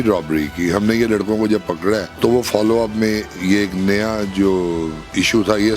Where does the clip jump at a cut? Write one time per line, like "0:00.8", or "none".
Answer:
0:02.1